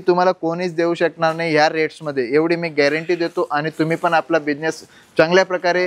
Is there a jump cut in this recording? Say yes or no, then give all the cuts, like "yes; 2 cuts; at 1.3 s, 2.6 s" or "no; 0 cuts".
no; 0 cuts